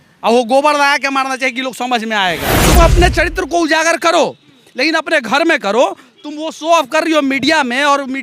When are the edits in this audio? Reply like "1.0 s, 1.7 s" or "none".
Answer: 2.6 s